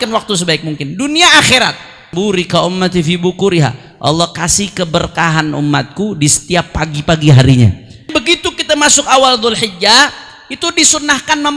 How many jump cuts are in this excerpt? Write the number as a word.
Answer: two